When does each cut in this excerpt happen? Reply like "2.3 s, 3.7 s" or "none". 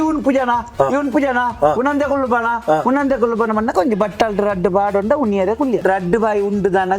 5.8 s